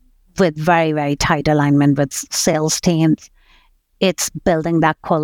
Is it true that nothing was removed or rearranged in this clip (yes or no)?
no